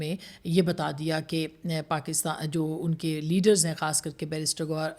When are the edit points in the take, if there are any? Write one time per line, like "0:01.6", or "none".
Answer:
none

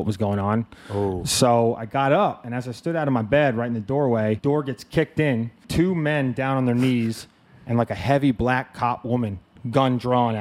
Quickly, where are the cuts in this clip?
0:04.4
0:05.7

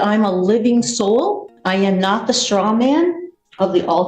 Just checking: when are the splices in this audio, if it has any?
0:01.5

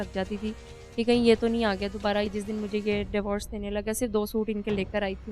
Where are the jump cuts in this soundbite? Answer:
0:02.3

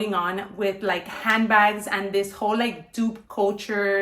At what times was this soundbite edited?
none

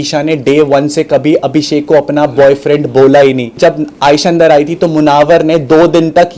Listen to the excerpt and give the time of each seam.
0:03.5

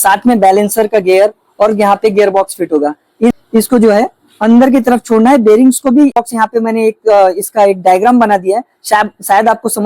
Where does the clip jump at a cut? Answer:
0:03.3
0:06.1

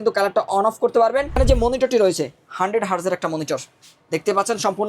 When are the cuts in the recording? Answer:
0:01.4

